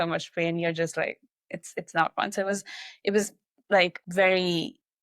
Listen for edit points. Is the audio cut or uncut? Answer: cut